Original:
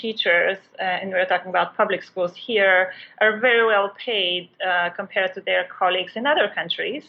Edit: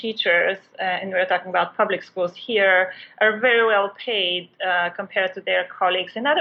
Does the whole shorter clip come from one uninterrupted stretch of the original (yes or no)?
yes